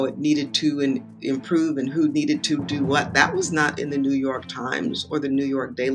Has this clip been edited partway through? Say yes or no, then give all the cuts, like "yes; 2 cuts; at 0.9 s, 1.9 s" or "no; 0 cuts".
no; 0 cuts